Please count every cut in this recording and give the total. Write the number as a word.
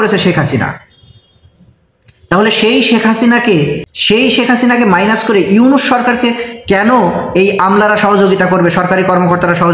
one